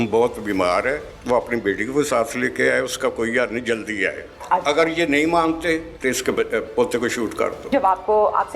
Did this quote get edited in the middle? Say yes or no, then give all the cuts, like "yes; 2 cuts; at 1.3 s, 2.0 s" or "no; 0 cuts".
yes; 4 cuts; at 1.1 s, 4.3 s, 5.9 s, 7.6 s